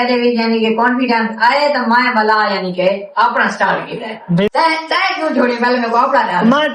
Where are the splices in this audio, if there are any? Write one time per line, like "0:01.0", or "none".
0:04.5